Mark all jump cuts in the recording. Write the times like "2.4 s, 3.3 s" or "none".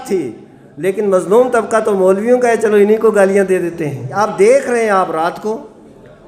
4.2 s